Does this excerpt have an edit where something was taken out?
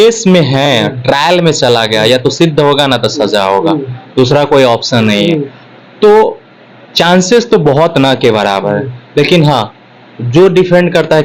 no; 0 cuts

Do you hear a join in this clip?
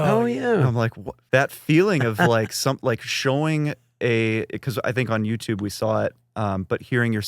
yes; 1 cut; at 1.1 s

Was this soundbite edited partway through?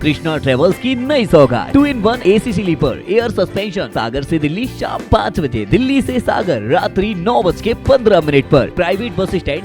yes; 3 cuts; at 1.8 s, 3.9 s, 8.7 s

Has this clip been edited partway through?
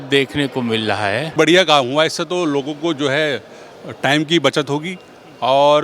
yes; 1 cut; at 1.3 s

